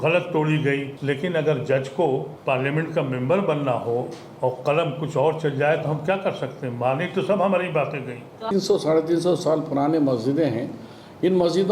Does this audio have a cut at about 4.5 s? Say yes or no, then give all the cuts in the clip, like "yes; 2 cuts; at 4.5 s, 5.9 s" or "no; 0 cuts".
no; 3 cuts; at 0.9 s, 2.3 s, 8.5 s